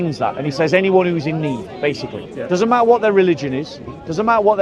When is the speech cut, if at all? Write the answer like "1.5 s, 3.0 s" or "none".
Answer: 2.3 s